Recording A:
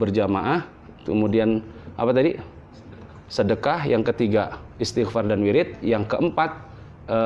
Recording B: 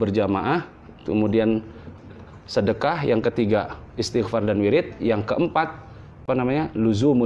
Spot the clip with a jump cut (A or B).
B